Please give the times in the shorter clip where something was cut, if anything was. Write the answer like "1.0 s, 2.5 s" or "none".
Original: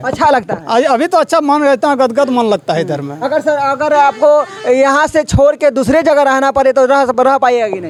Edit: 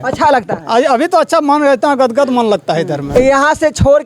3.0 s

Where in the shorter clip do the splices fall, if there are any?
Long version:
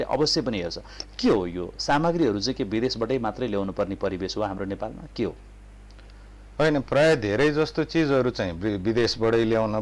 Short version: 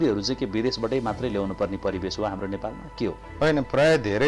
3.2 s

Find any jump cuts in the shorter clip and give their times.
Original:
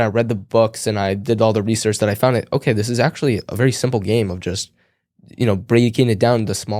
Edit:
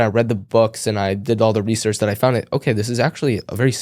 none

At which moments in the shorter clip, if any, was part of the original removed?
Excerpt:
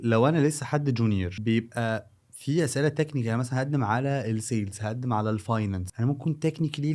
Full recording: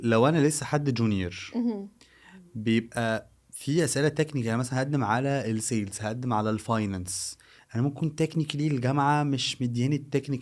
1.3 s, 5.9 s

